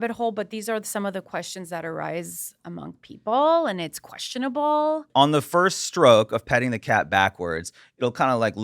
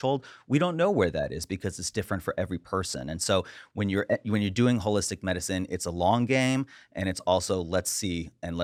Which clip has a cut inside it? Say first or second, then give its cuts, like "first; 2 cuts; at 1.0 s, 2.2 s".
first; 1 cut; at 5.1 s